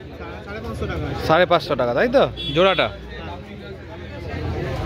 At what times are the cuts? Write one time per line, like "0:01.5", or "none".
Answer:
none